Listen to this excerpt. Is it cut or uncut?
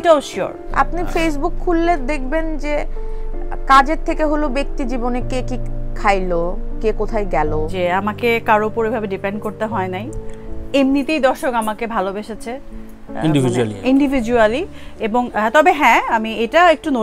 uncut